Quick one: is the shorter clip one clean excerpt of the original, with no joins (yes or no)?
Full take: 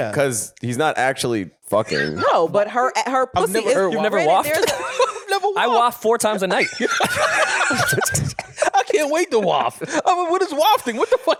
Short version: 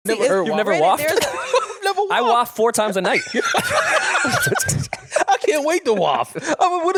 yes